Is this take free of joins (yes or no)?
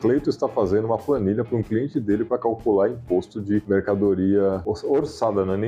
no